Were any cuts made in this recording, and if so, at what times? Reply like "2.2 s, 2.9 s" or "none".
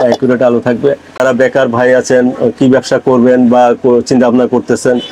1.2 s